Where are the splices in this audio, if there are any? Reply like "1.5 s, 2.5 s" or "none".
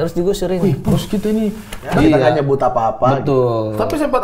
1.9 s